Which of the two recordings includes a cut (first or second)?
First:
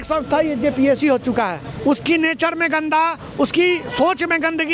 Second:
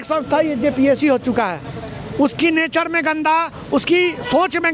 first